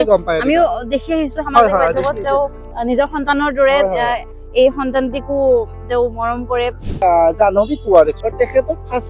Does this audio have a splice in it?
yes; 3 cuts; at 2.7 s, 7.0 s, 8.2 s

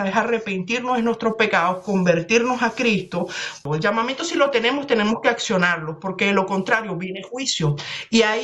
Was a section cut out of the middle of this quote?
yes; 1 cut; at 3.5 s

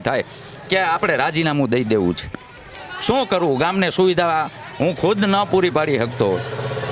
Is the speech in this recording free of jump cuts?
yes; 0 cuts

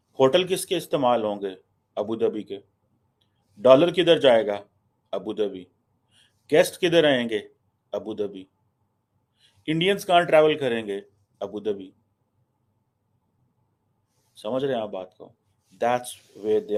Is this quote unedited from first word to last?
yes; 0 cuts

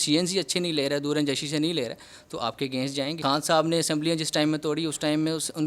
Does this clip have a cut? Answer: yes; 1 cut; at 3.2 s

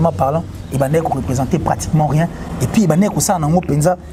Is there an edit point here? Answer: no; 0 cuts

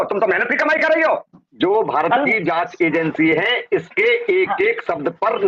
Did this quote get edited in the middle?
yes; 1 cut; at 1.4 s

